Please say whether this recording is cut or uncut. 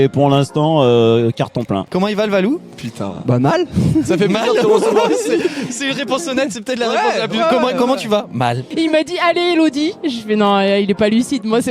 cut